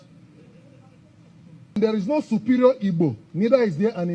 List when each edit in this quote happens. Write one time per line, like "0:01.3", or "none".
0:01.8